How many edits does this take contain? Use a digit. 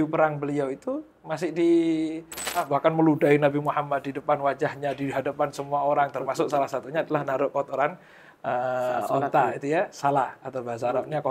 1